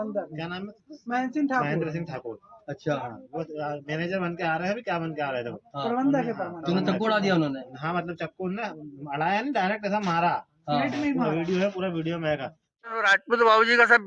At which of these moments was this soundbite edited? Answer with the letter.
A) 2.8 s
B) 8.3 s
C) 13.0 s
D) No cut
C